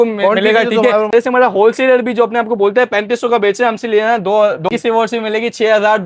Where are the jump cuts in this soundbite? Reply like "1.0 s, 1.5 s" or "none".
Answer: 1.1 s, 4.7 s